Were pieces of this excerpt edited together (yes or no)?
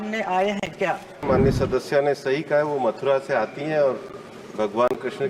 yes